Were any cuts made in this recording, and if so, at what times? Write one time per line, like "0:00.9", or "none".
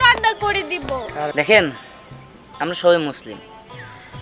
0:01.3